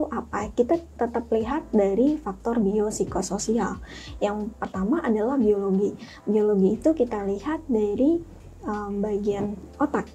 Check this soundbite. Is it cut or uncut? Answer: uncut